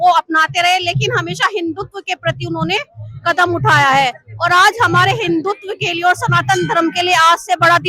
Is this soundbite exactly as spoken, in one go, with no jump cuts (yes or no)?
yes